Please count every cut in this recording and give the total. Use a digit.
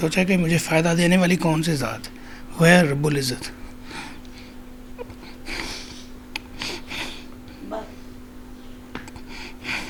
0